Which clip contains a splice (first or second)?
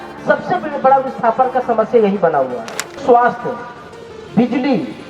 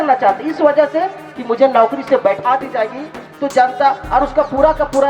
first